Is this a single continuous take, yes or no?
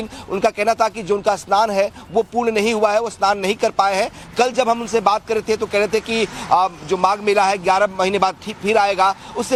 yes